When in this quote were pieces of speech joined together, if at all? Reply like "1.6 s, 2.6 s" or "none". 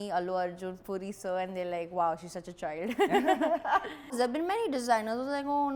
4.1 s